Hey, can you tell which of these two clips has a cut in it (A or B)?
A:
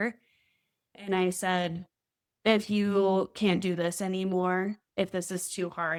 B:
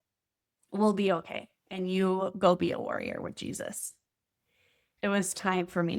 B